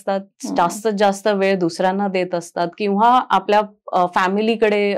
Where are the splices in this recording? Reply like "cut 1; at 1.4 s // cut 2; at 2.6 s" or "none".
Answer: none